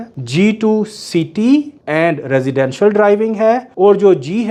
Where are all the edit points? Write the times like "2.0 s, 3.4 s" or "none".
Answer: none